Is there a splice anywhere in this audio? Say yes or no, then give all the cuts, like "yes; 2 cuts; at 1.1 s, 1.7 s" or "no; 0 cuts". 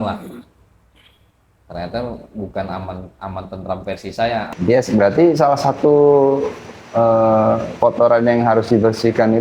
yes; 1 cut; at 4.5 s